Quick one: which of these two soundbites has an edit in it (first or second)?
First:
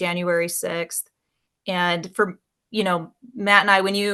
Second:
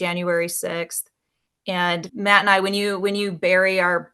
second